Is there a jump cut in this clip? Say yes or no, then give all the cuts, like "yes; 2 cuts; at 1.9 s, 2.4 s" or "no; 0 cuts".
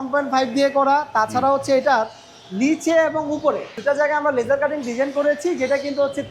yes; 1 cut; at 3.7 s